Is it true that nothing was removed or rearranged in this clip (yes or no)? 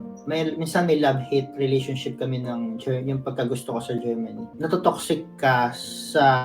no